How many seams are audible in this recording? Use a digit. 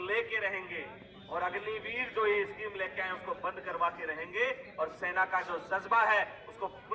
0